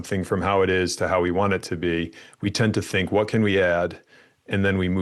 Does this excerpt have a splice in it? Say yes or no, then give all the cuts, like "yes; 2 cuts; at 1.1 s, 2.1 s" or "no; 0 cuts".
no; 0 cuts